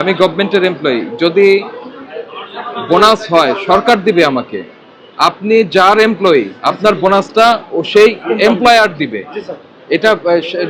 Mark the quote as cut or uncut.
uncut